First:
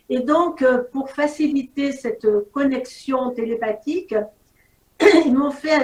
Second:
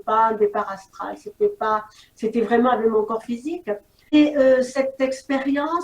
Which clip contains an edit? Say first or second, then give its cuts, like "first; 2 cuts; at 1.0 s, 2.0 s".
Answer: second; 1 cut; at 4.1 s